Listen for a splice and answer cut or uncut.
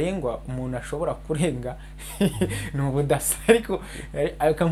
uncut